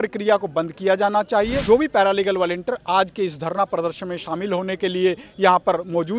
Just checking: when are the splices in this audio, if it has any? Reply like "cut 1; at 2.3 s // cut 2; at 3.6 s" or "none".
cut 1; at 1.6 s